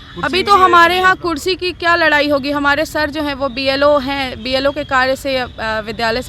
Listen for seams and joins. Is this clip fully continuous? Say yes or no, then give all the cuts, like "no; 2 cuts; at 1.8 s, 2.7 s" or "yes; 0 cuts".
yes; 0 cuts